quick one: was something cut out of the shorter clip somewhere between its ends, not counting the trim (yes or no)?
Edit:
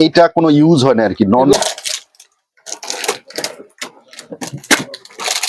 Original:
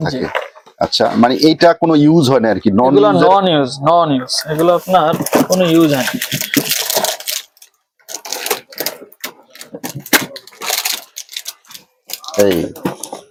yes